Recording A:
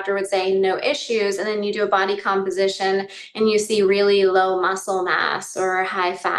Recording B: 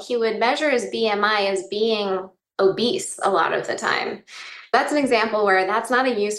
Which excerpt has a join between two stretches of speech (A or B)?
B